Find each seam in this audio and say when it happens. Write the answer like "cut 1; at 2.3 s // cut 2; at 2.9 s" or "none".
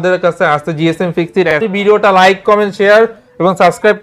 cut 1; at 1.6 s